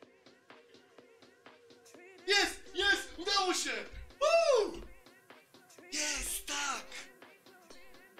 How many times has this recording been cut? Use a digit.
0